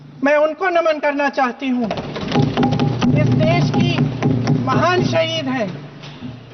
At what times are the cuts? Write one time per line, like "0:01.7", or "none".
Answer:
none